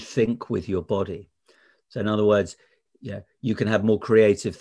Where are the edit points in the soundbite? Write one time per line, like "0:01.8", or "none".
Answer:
none